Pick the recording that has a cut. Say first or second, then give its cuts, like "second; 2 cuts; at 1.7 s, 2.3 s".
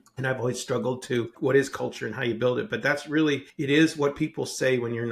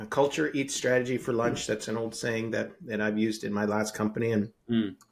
first; 2 cuts; at 1.3 s, 3.5 s